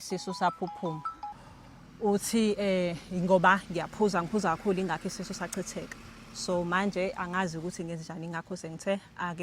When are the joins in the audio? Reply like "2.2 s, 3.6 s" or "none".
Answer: 1.3 s